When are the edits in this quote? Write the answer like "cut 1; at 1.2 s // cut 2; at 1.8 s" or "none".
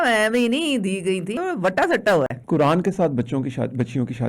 cut 1; at 1.4 s // cut 2; at 2.4 s